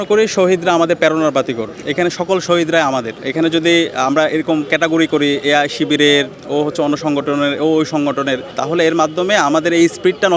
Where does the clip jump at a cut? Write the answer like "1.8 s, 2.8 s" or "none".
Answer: 2.3 s, 3.2 s, 8.5 s